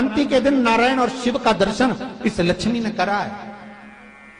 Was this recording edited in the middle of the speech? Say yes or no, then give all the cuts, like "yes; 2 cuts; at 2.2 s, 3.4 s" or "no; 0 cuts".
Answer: no; 0 cuts